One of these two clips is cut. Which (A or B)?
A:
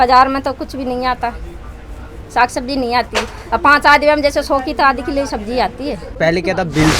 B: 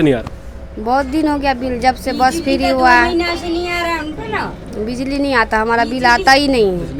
A